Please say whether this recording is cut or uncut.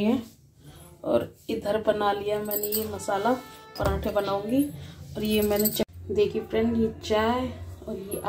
cut